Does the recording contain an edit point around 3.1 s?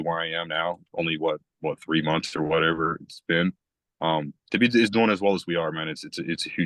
no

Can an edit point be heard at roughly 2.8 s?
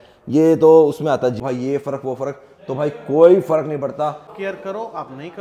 no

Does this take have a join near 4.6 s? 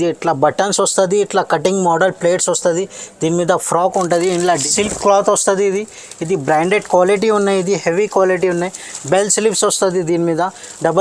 yes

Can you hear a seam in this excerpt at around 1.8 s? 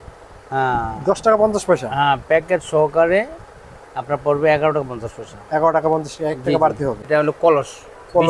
no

